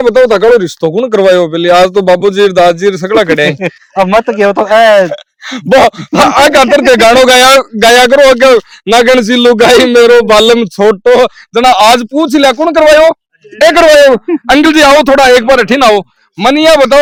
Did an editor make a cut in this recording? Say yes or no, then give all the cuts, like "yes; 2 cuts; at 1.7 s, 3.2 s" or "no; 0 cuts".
no; 0 cuts